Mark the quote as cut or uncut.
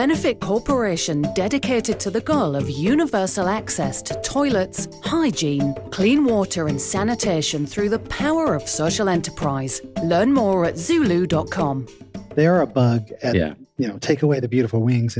cut